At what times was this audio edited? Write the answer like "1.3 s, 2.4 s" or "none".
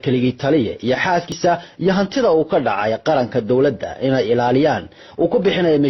1.3 s